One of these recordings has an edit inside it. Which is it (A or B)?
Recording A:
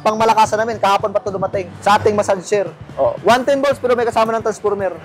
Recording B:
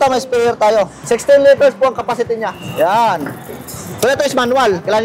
A